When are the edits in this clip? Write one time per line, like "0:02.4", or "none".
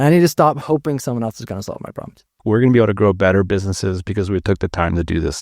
0:02.4